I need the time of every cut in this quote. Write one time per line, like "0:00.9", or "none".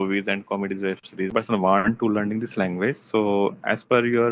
0:01.3